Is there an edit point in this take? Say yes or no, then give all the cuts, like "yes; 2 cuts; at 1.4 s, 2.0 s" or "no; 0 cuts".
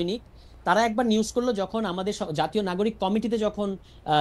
no; 0 cuts